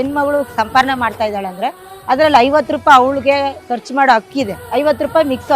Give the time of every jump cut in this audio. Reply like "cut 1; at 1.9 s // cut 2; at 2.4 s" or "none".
cut 1; at 4.6 s